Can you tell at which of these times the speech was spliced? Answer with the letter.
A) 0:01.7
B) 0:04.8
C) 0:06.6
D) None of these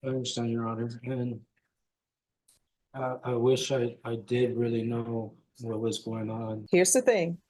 C